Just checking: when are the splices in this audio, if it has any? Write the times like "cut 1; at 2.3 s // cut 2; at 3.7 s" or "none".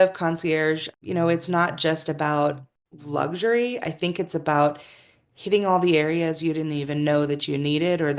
none